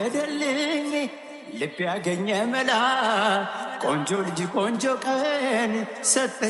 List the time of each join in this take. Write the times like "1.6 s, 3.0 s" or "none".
none